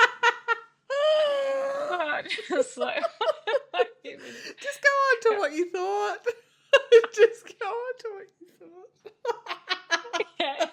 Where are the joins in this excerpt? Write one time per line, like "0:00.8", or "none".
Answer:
none

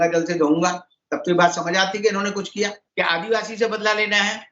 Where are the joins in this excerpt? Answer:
0:02.8

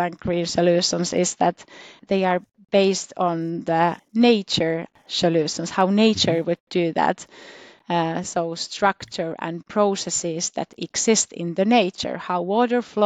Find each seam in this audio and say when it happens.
0:02.0
0:04.0
0:05.0

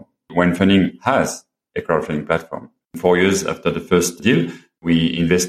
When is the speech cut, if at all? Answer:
0:03.0
0:04.3

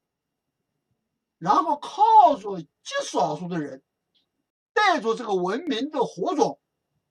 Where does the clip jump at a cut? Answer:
0:04.8

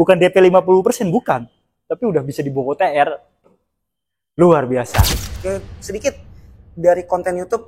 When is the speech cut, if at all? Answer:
0:05.3

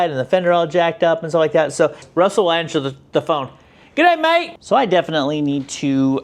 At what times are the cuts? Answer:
0:02.0
0:04.5

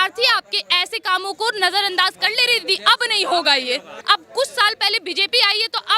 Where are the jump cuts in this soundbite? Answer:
0:03.9

